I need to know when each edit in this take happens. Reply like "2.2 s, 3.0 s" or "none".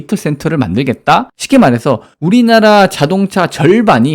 1.4 s